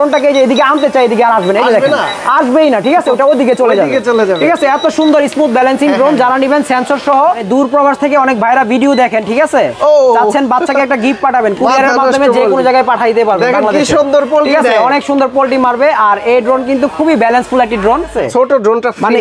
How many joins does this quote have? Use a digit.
2